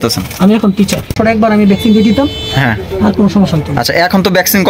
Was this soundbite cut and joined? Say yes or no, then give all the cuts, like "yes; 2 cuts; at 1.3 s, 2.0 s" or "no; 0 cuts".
yes; 1 cut; at 1.2 s